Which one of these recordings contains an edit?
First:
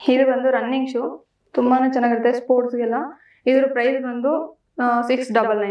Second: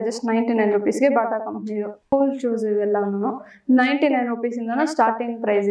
second; 1 cut; at 2.0 s

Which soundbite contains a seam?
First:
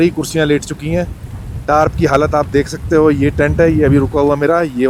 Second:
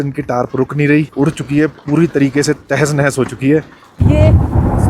second; 2 cuts; at 1.1 s, 4.0 s

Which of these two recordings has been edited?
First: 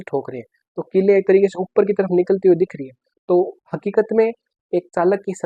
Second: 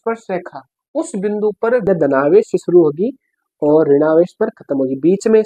second; 1 cut; at 1.9 s

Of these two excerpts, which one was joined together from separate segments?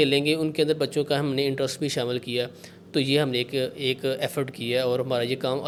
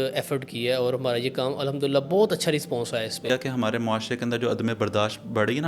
second; 1 cut; at 3.3 s

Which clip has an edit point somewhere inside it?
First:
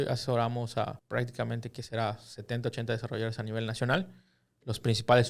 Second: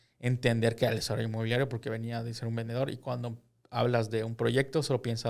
first; 1 cut; at 1.0 s

